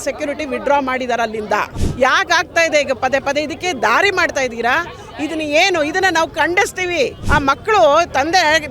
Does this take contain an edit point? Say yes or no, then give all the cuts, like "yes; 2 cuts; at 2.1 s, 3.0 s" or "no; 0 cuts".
yes; 2 cuts; at 1.8 s, 7.2 s